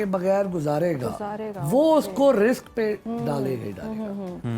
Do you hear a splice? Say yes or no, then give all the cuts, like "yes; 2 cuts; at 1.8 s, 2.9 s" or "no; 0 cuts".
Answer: no; 0 cuts